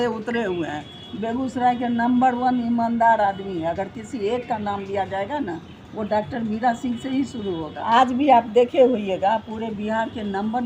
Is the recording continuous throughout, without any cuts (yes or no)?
yes